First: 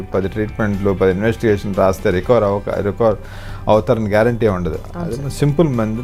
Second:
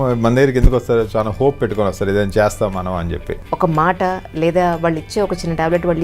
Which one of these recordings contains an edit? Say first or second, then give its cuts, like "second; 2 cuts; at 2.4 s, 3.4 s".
second; 1 cut; at 3.4 s